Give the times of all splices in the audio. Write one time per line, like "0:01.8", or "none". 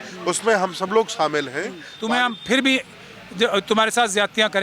0:01.9